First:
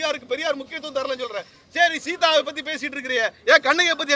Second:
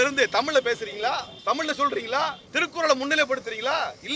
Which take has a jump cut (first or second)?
second